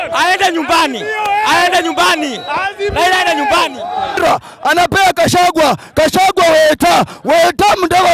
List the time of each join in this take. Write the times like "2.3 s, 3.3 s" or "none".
4.2 s